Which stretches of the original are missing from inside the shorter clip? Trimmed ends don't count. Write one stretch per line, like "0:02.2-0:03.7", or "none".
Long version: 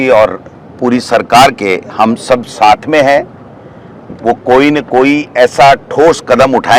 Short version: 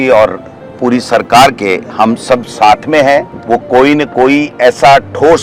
0:03.3-0:04.1